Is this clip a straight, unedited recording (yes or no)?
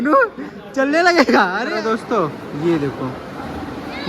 no